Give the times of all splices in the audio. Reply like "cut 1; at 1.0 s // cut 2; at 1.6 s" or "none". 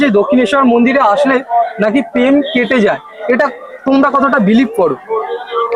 none